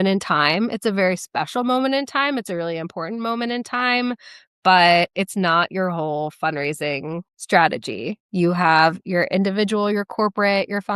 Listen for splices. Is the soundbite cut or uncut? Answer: uncut